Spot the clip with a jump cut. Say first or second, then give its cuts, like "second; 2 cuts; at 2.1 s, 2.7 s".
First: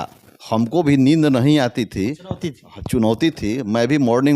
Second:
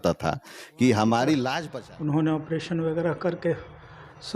second; 1 cut; at 1.6 s